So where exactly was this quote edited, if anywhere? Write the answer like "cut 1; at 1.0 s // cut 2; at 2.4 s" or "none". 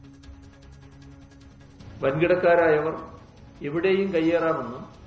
none